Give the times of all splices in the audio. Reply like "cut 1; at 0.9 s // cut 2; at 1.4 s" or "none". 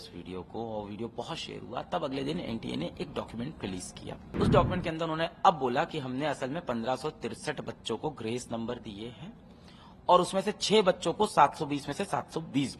cut 1; at 4.3 s